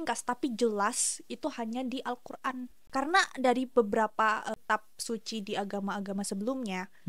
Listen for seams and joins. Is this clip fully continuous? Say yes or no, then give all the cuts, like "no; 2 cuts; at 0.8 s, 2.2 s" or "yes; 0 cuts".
no; 2 cuts; at 2.8 s, 4.5 s